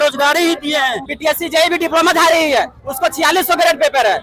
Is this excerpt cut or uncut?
cut